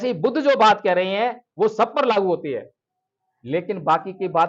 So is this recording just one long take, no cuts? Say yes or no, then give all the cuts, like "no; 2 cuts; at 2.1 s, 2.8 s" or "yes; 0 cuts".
yes; 0 cuts